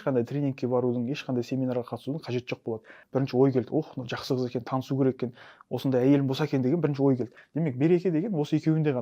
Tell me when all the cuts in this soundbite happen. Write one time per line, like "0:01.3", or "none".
0:03.0
0:07.4